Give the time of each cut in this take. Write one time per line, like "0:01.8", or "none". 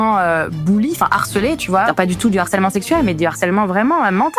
0:01.9